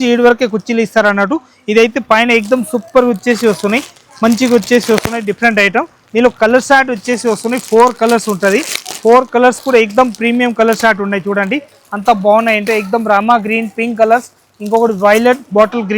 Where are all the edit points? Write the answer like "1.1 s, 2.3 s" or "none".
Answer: none